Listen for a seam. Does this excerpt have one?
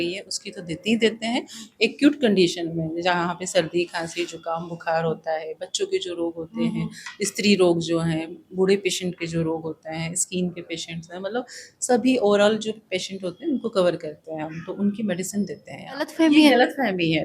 yes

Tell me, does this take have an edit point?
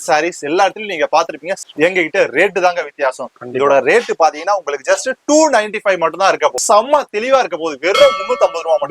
yes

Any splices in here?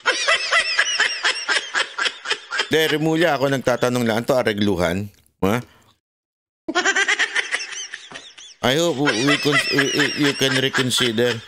yes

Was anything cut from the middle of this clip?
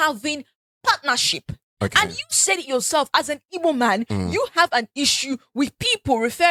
no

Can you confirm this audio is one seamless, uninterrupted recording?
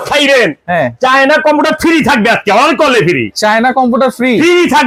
yes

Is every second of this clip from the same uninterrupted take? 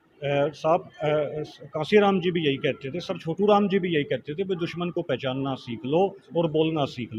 yes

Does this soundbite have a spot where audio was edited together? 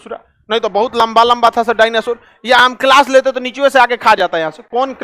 no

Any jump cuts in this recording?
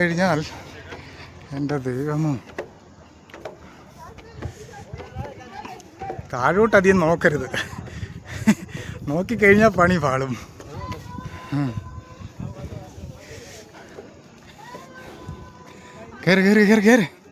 no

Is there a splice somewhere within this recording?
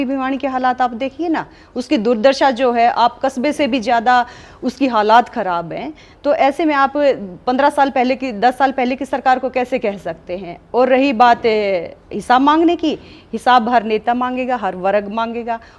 no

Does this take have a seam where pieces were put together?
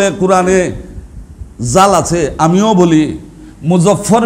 no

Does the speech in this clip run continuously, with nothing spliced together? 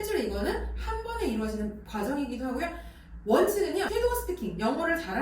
no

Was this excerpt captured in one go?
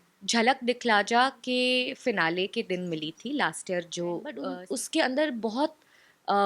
no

